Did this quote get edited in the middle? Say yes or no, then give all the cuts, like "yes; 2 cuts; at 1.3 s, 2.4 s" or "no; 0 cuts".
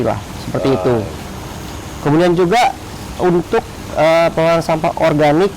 no; 0 cuts